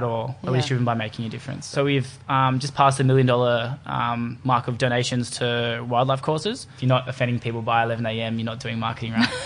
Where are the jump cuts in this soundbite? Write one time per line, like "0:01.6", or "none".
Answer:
0:01.7
0:06.7

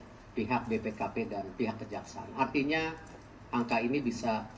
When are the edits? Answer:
none

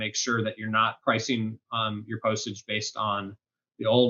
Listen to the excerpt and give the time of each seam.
0:01.0

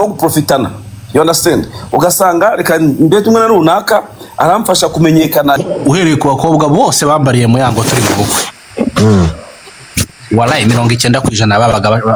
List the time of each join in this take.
0:05.6

